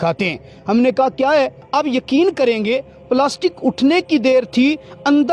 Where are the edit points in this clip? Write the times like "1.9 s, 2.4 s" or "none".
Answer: 1.6 s